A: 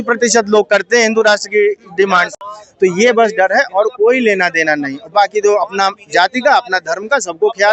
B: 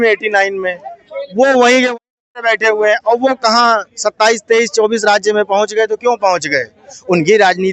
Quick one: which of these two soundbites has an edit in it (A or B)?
A